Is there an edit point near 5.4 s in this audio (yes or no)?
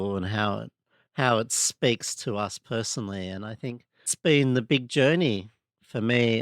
no